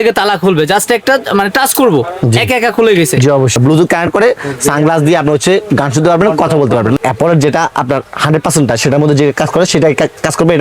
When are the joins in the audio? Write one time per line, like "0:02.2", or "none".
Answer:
0:03.6
0:07.0